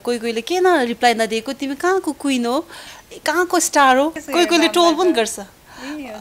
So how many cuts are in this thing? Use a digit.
1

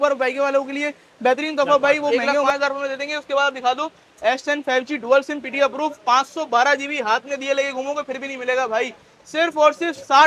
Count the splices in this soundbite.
1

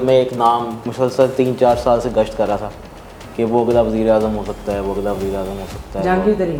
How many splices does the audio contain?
0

